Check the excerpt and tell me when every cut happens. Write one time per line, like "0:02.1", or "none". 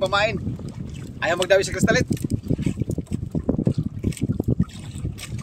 none